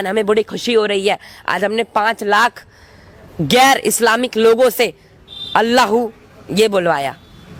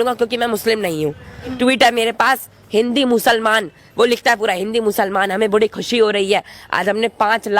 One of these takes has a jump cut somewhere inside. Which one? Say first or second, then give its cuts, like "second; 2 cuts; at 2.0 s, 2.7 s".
second; 1 cut; at 1.6 s